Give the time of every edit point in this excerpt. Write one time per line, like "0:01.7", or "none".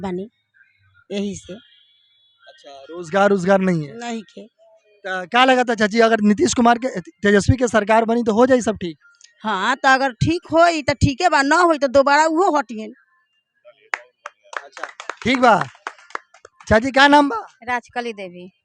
none